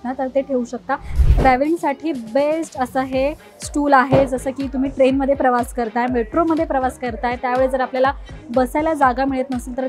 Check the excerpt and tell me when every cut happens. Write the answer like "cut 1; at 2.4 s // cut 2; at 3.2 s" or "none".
cut 1; at 1.1 s